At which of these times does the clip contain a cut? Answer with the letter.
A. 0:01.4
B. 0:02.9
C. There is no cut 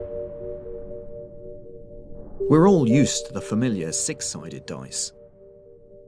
B